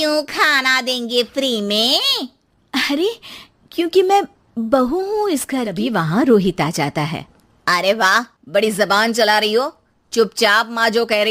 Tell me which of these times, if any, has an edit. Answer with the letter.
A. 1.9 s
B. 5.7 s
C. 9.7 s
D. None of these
B